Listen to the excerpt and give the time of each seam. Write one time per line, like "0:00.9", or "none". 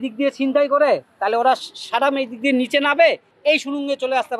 none